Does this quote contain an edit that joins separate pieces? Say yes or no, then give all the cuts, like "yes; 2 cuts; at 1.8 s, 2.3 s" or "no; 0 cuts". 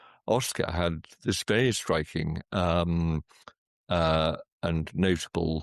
no; 0 cuts